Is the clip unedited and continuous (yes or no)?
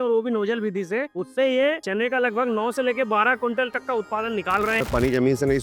no